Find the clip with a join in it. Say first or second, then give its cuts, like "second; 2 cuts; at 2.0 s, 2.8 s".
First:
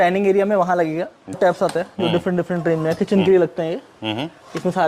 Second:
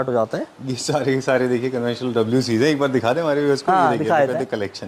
first; 1 cut; at 1.4 s